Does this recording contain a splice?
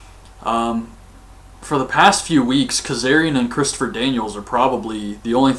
no; 0 cuts

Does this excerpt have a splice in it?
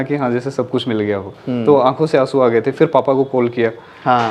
yes; 1 cut; at 1.3 s

